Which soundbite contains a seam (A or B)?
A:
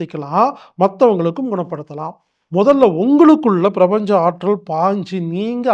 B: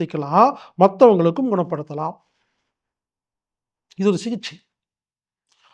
A